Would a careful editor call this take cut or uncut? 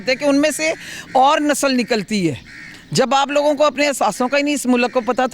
uncut